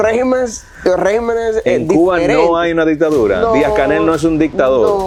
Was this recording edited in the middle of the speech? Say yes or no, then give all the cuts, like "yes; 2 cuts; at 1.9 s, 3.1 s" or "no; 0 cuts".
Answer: no; 0 cuts